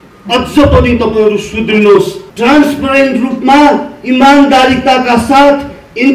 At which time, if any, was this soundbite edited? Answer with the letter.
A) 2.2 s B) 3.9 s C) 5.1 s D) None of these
A